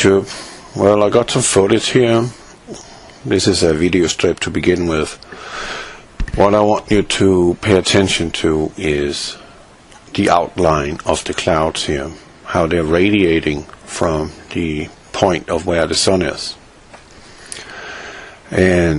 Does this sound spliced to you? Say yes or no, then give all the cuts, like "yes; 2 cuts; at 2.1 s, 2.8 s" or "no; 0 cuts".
no; 0 cuts